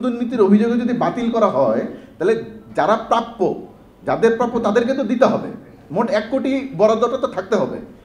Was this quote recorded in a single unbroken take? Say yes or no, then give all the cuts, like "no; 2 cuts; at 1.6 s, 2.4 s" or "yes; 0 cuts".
yes; 0 cuts